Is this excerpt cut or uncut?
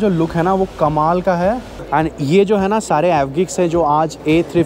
cut